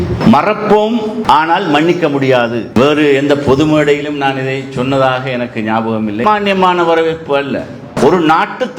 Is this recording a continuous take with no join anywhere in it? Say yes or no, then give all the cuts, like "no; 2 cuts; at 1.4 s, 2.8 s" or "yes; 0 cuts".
no; 2 cuts; at 2.6 s, 6.2 s